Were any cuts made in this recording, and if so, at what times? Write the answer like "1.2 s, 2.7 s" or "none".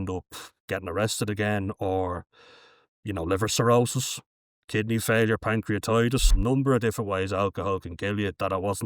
6.3 s